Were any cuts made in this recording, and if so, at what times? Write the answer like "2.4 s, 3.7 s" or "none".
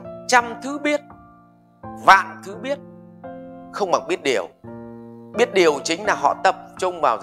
none